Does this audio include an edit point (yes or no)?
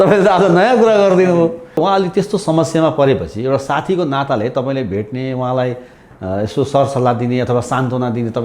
yes